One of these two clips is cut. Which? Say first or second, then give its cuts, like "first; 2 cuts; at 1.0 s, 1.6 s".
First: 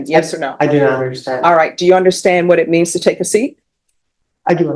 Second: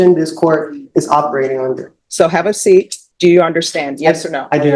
second; 2 cuts; at 1.9 s, 3.0 s